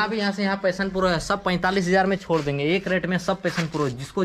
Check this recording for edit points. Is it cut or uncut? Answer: uncut